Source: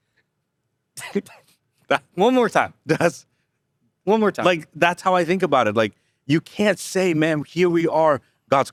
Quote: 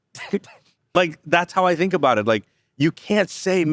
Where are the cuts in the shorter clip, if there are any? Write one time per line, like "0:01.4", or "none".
0:00.9